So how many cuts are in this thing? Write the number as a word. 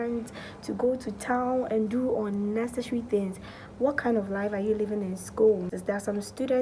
one